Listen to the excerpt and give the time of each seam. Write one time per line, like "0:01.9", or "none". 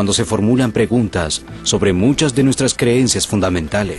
none